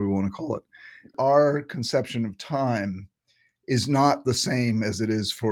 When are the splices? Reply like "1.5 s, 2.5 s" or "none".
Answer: 1.1 s